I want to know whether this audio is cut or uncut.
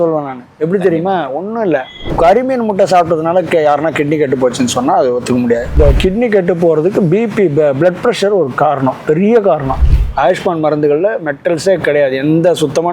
cut